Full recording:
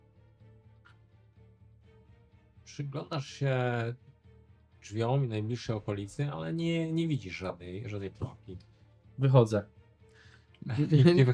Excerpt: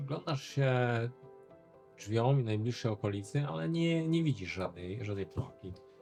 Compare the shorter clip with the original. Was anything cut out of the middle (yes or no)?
no